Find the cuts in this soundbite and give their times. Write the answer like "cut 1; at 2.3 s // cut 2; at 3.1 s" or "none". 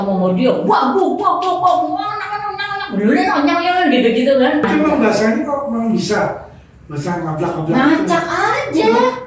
cut 1; at 4.7 s